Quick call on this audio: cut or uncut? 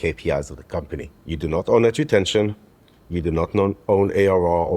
cut